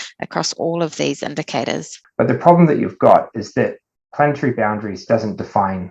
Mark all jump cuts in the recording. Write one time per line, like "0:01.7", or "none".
0:01.9